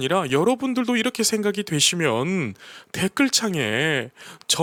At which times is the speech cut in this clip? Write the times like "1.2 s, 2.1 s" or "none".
none